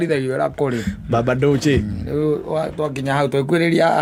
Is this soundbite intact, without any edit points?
yes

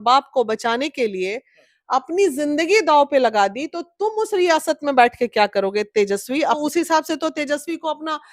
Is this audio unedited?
no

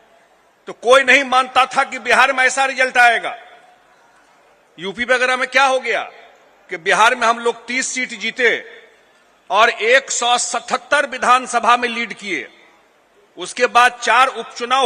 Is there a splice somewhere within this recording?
no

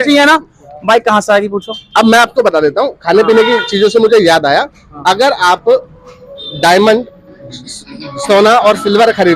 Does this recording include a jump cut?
no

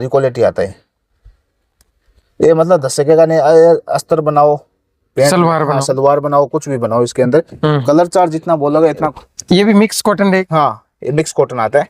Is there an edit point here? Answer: yes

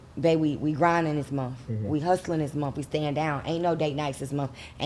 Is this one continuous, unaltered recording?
yes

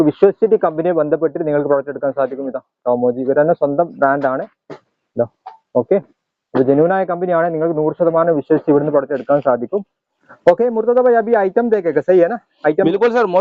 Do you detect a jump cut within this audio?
no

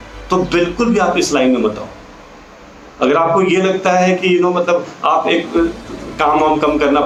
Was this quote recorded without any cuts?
yes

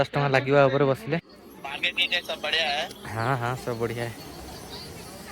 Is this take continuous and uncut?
no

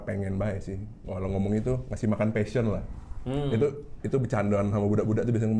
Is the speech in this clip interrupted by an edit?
no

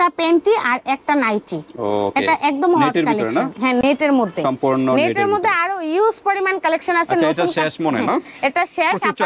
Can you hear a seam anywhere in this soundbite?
no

